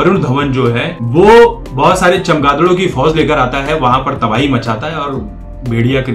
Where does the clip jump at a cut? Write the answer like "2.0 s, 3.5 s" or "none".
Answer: 0.9 s, 1.6 s